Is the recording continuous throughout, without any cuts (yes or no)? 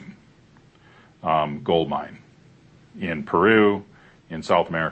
yes